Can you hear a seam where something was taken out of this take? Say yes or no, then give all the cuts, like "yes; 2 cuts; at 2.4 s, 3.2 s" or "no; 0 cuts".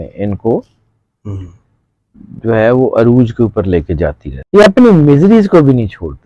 yes; 1 cut; at 4.3 s